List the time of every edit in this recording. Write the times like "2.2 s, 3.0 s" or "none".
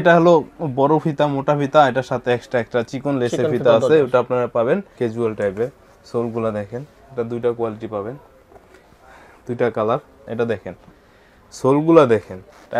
4.9 s, 10.2 s